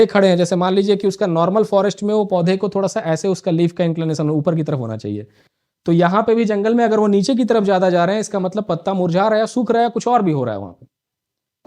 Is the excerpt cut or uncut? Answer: uncut